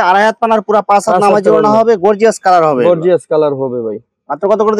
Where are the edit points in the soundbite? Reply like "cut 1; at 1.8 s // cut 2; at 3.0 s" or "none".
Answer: none